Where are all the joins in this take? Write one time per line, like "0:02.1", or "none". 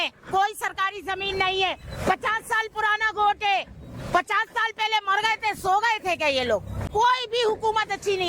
0:06.8

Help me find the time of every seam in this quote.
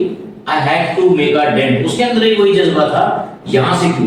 none

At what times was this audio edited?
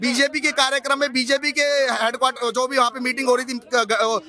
none

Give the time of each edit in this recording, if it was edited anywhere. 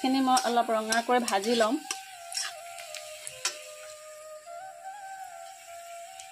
none

